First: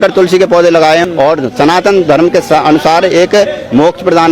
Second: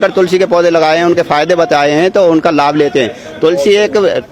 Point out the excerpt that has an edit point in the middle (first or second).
first